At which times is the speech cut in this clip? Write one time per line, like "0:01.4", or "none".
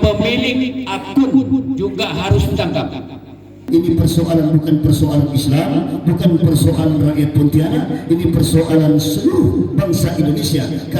0:03.7